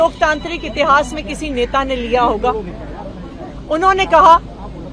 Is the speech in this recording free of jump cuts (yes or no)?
yes